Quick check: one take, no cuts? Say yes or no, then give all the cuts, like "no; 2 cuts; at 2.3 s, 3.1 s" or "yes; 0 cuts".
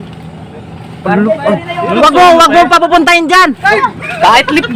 no; 1 cut; at 3.7 s